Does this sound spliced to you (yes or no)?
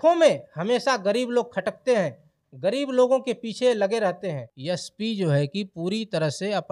yes